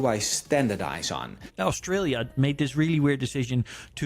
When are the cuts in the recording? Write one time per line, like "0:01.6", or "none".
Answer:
0:01.4